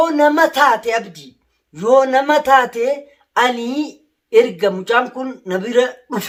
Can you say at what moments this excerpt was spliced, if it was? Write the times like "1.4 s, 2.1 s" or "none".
none